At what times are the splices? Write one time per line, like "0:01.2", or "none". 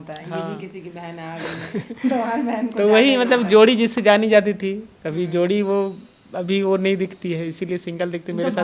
none